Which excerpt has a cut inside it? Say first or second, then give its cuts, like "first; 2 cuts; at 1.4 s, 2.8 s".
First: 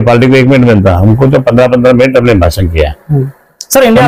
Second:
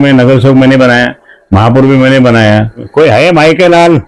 second; 1 cut; at 2.9 s